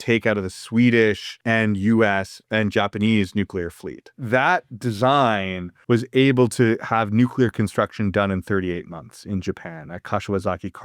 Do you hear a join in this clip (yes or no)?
yes